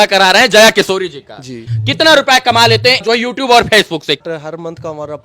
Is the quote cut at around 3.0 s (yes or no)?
yes